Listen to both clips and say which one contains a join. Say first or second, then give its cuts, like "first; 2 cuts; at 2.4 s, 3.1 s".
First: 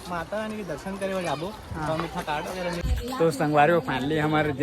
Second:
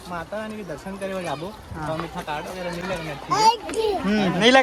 first; 1 cut; at 2.8 s